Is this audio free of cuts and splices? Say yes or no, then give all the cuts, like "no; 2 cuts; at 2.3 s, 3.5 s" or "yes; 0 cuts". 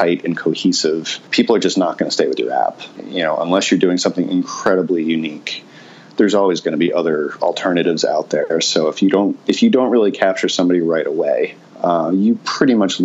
no; 1 cut; at 11.6 s